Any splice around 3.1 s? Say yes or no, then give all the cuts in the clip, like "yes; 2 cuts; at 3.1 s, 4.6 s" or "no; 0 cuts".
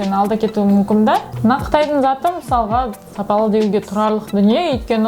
no; 1 cut; at 1.3 s